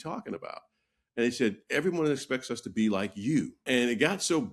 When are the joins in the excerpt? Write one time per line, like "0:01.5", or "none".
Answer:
0:03.6